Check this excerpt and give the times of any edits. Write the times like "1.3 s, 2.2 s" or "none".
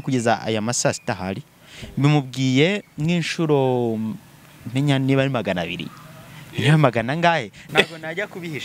7.6 s